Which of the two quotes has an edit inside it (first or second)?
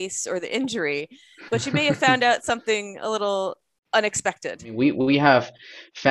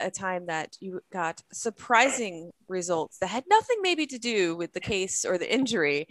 first